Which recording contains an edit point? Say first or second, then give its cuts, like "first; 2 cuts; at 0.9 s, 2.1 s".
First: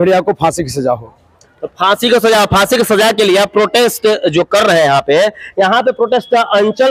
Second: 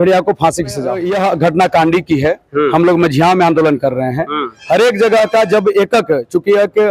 second; 1 cut; at 1.0 s